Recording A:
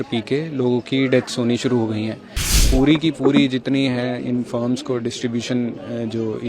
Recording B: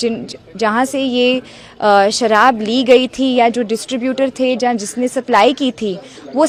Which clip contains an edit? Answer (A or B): A